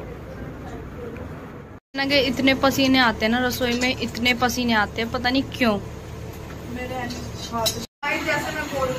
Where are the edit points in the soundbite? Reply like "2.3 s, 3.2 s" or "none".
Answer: 1.8 s, 7.8 s